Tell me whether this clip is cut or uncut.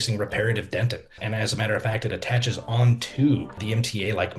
cut